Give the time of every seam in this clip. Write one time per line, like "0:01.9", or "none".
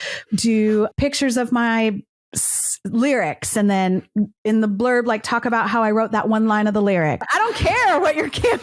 0:00.9
0:07.2